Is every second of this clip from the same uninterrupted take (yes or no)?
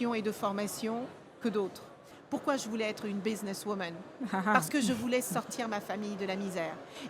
no